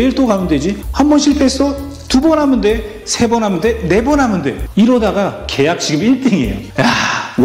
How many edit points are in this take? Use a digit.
0